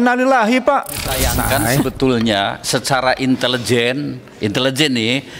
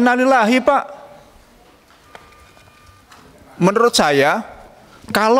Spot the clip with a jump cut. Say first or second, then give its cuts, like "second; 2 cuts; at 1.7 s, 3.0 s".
first; 1 cut; at 1.2 s